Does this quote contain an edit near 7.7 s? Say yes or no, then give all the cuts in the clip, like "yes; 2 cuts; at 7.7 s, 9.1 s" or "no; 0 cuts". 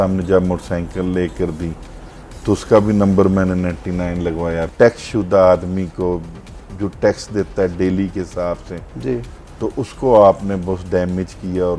no; 1 cut; at 4.7 s